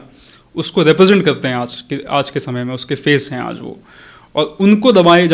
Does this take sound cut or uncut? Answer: uncut